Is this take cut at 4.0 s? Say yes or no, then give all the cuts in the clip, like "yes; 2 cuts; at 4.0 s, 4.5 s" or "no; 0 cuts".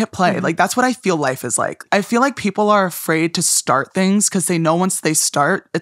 no; 1 cut; at 1.8 s